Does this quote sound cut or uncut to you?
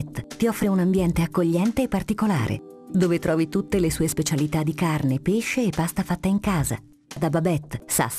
uncut